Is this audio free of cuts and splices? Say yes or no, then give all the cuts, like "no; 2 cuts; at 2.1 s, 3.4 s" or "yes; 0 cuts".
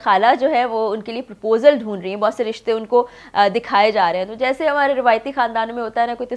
yes; 0 cuts